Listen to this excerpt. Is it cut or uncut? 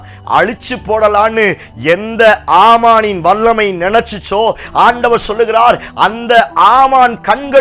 uncut